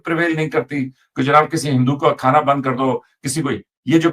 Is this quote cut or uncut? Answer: uncut